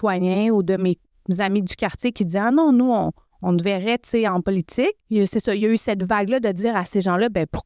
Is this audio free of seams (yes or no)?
no